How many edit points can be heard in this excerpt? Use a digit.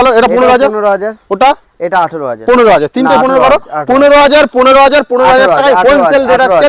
0